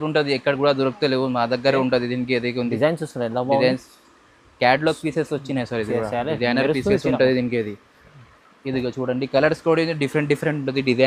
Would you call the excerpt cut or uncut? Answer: uncut